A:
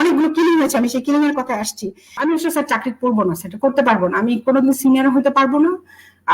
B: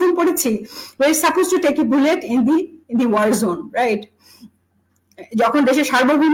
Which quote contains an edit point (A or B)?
A